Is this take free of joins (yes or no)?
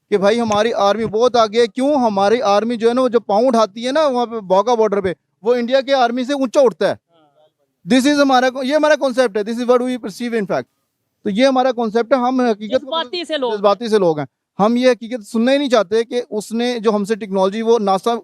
yes